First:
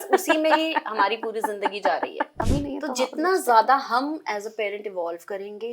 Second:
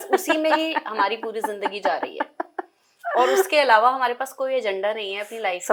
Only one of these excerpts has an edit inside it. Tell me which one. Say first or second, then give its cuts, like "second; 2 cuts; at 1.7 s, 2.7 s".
first; 1 cut; at 2.4 s